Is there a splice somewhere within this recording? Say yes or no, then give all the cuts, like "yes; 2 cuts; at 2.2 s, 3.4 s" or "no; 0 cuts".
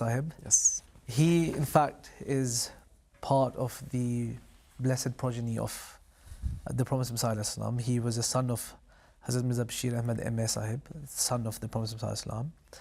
no; 0 cuts